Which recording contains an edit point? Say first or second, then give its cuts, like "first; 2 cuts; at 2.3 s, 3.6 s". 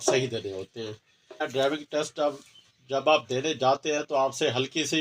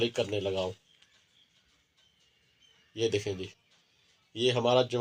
first; 1 cut; at 1.4 s